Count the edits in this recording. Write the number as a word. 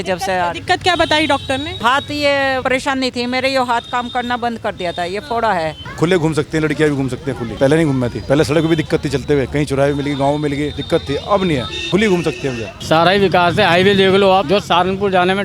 nine